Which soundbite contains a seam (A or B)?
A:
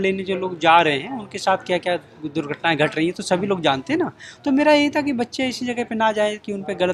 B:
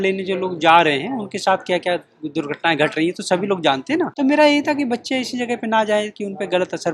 B